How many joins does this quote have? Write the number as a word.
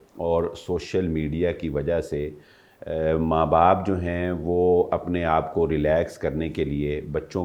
zero